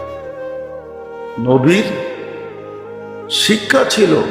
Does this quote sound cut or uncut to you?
cut